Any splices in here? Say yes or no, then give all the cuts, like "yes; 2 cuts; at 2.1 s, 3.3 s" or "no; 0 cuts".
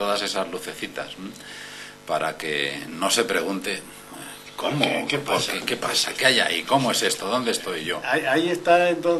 yes; 1 cut; at 8.0 s